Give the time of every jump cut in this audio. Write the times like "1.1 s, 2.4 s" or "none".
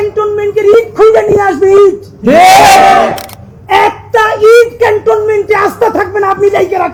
none